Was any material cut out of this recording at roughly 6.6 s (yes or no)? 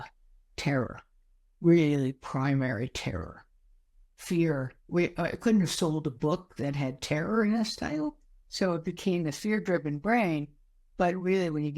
no